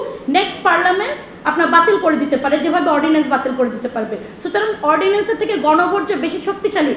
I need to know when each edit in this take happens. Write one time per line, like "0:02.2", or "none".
none